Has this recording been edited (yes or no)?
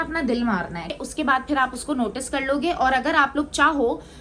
yes